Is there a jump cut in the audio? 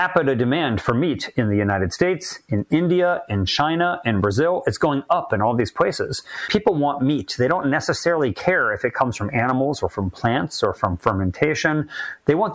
yes; 1 cut; at 6.5 s

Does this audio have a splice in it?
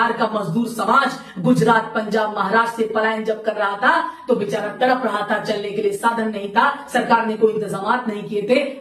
no; 0 cuts

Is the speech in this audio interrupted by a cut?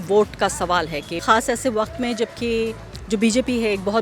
yes; 1 cut; at 1.2 s

